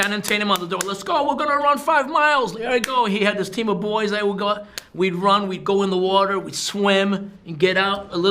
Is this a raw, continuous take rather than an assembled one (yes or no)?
yes